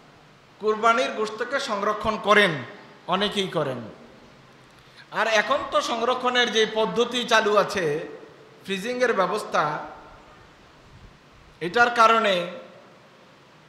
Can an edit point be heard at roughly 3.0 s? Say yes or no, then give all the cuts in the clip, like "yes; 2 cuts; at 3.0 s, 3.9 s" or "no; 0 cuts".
no; 0 cuts